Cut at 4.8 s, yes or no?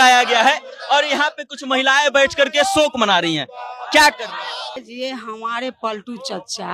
yes